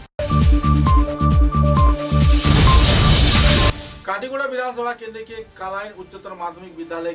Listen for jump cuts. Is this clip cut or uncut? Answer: cut